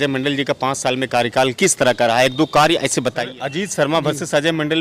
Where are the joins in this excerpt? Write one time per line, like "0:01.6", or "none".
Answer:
0:03.3

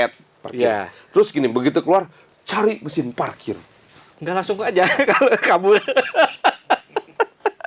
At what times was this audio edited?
none

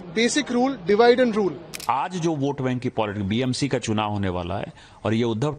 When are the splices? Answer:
0:01.8

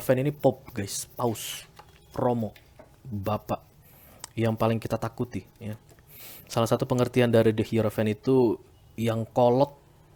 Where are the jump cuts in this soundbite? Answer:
none

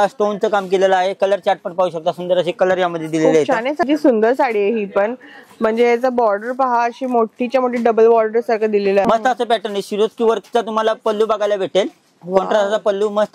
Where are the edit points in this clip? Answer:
0:03.8
0:09.0

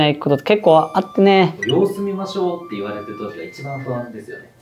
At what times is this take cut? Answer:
0:01.6

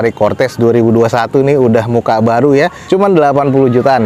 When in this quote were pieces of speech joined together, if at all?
none

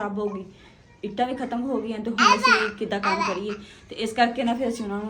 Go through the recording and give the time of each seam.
none

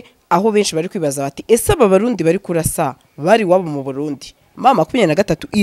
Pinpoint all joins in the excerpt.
none

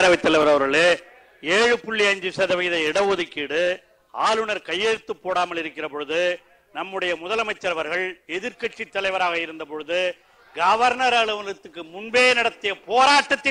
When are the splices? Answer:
none

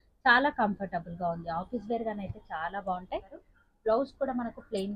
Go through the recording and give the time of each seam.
0:03.4

